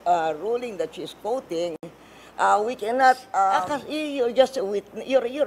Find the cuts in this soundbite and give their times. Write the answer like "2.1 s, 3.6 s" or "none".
3.7 s